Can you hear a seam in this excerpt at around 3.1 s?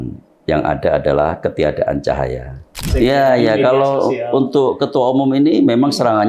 yes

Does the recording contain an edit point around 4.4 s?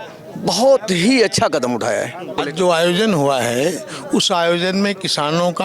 no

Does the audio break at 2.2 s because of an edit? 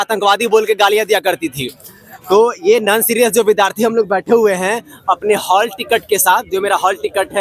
no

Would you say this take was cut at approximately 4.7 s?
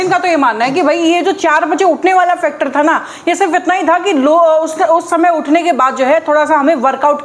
no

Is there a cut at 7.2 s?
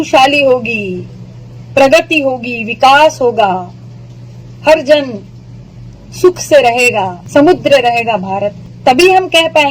yes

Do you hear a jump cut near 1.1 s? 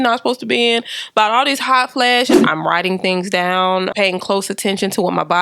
no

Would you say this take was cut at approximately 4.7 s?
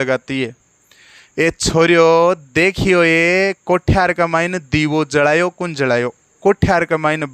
no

